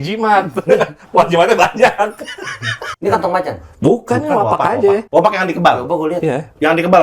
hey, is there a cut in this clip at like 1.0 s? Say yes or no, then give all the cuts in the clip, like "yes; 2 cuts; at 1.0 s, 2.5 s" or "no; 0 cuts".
no; 2 cuts; at 2.8 s, 5.0 s